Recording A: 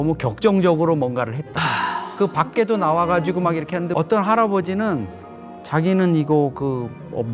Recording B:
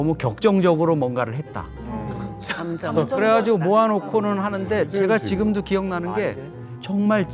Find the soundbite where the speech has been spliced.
A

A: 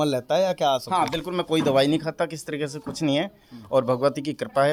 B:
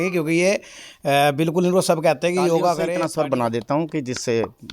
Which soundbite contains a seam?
B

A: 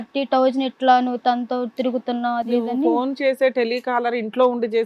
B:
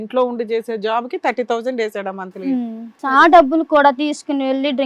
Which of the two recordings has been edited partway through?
B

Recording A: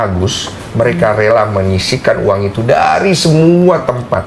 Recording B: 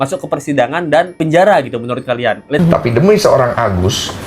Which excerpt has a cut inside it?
B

